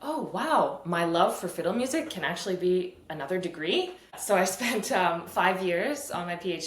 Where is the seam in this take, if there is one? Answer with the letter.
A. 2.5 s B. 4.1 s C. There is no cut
B